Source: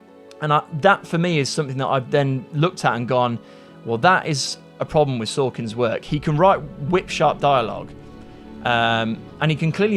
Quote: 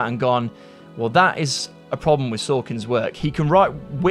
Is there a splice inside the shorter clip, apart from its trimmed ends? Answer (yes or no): no